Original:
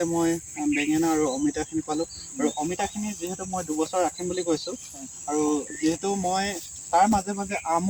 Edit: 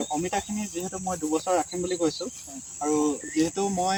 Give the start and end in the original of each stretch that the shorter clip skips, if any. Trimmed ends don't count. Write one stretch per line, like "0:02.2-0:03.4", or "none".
none